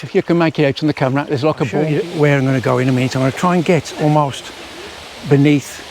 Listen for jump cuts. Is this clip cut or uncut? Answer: cut